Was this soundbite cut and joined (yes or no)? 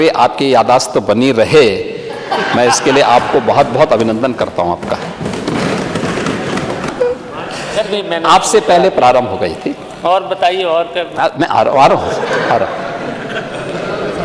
yes